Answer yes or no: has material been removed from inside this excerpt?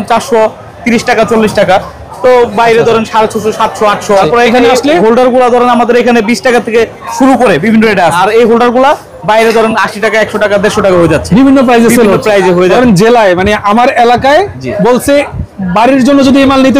yes